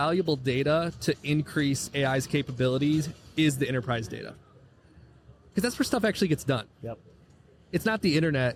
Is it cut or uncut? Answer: uncut